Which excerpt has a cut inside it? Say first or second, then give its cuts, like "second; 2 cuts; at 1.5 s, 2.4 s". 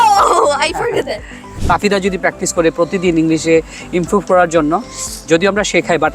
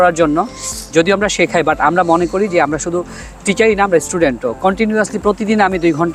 first; 1 cut; at 1.5 s